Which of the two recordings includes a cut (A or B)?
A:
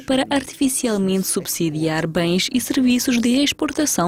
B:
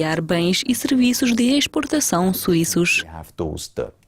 B